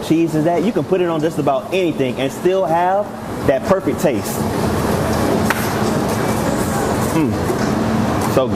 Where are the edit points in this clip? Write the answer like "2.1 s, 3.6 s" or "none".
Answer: none